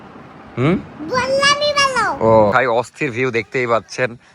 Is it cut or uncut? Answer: cut